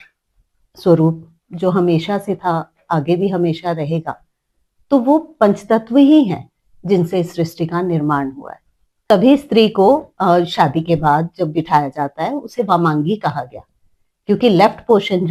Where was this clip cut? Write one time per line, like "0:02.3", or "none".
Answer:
0:09.1